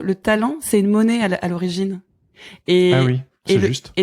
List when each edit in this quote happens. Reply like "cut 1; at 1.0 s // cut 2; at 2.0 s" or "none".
none